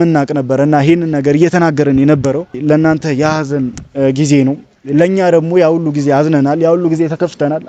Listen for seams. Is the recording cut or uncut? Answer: cut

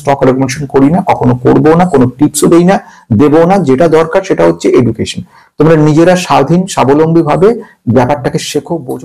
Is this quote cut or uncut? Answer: uncut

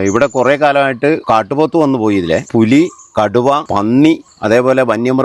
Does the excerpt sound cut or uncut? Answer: cut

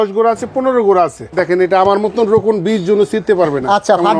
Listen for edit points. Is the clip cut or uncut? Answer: cut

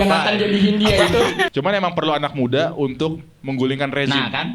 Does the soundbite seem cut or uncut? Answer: cut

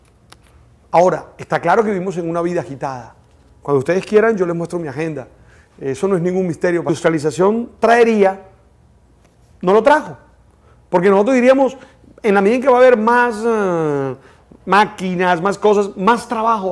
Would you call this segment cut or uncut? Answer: uncut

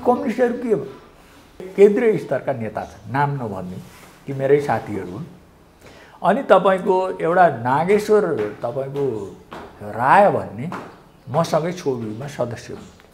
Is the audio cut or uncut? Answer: cut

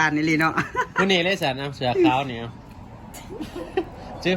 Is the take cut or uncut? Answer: uncut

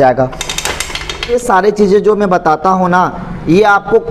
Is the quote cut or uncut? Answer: cut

